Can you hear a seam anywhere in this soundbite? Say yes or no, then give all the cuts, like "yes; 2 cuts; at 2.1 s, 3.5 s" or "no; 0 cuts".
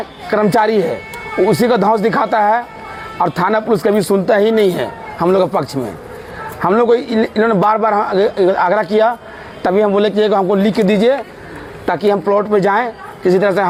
no; 0 cuts